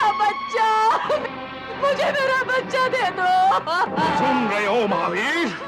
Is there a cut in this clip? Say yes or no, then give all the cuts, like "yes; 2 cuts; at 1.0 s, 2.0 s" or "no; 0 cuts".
yes; 1 cut; at 1.8 s